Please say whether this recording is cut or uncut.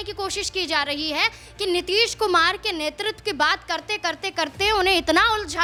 uncut